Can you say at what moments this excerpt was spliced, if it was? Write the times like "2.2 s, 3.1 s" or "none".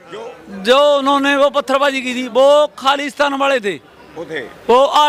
none